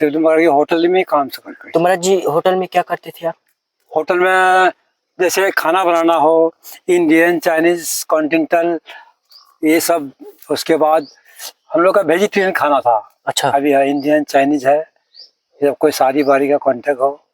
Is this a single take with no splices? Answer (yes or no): yes